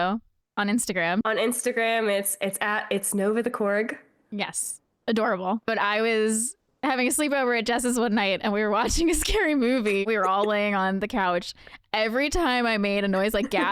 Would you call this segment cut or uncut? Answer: cut